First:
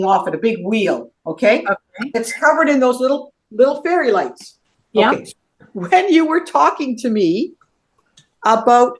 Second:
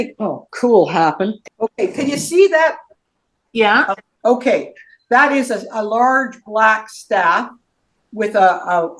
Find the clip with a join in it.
second; 3 cuts; at 1.4 s, 2.9 s, 4.1 s

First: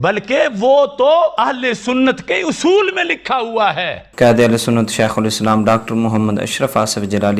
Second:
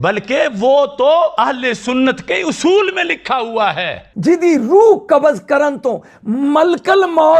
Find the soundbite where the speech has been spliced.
second; 1 cut; at 4.0 s

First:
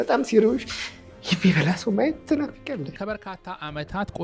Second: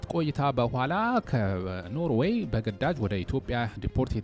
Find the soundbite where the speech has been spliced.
first; 1 cut; at 2.9 s

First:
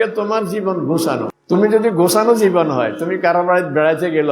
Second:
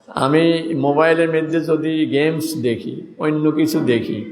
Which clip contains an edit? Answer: first; 1 cut; at 1.3 s

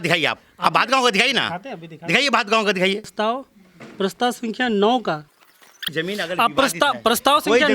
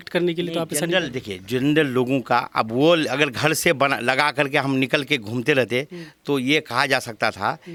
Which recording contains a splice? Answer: first; 2 cuts; at 3.1 s, 5.9 s

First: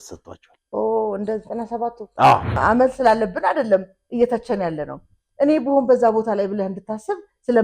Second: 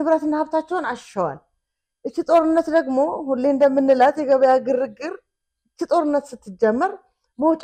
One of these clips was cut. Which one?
first; 1 cut; at 2.5 s

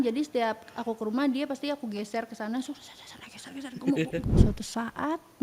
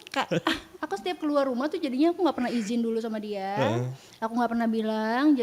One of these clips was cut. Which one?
first; 1 cut; at 4.2 s

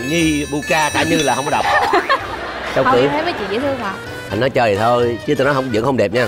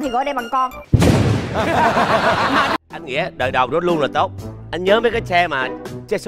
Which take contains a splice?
second; 1 cut; at 2.8 s

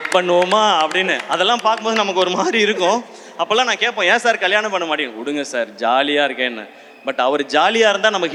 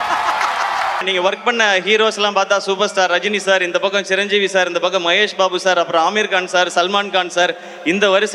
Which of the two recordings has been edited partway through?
second; 1 cut; at 1.0 s

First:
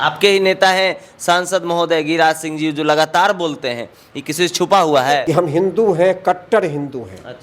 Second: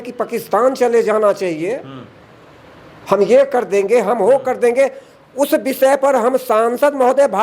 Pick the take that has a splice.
first; 1 cut; at 5.2 s

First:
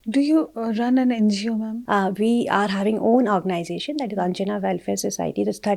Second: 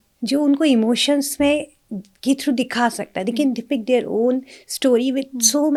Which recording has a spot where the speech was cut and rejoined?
first; 1 cut; at 1.8 s

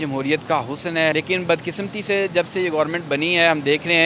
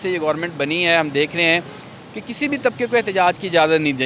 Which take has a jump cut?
first; 1 cut; at 1.1 s

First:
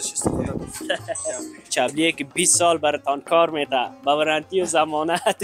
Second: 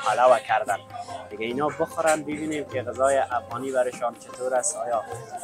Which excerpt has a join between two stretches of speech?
first; 1 cut; at 1.7 s

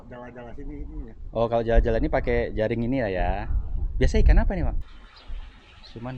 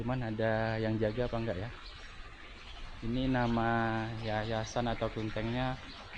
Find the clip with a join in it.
first; 1 cut; at 4.9 s

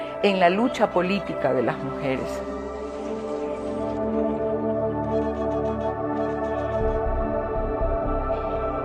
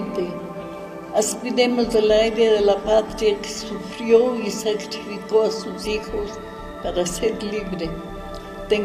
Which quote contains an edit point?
first; 1 cut; at 7.3 s

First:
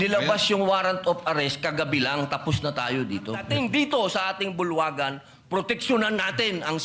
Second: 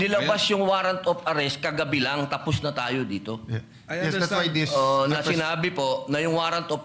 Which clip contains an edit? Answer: first; 1 cut; at 3.4 s

